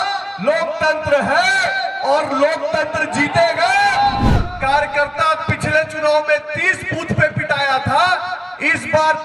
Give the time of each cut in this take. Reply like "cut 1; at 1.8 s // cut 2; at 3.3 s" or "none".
cut 1; at 4.3 s